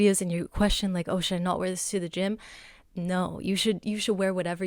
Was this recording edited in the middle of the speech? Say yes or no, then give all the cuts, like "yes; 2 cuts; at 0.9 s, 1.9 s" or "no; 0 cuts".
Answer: no; 0 cuts